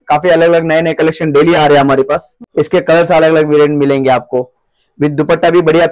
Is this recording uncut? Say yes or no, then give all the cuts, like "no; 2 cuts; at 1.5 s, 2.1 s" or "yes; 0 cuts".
no; 1 cut; at 2.3 s